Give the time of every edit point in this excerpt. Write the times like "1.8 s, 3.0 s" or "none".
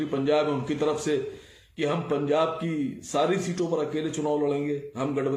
none